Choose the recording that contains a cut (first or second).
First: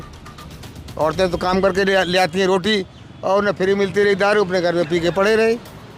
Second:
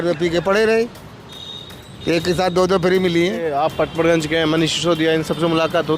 second